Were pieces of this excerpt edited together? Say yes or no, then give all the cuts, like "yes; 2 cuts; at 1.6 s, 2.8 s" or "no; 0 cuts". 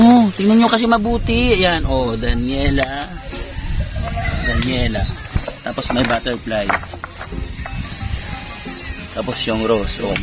no; 0 cuts